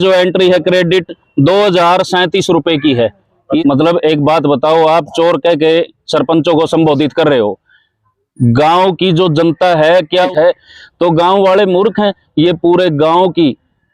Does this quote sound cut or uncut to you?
cut